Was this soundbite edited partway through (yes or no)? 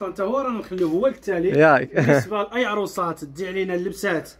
no